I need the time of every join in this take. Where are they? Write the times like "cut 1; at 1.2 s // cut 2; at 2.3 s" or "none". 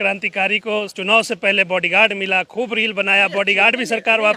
cut 1; at 0.9 s